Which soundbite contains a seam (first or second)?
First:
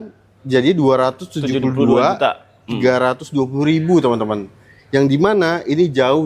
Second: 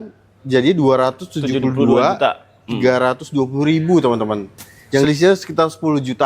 second